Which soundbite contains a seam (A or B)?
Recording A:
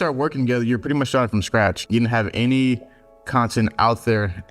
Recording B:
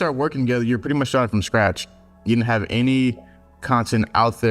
A